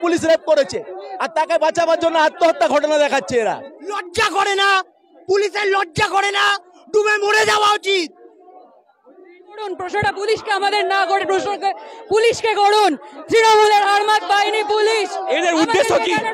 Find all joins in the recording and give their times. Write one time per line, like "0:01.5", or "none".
0:04.0
0:09.7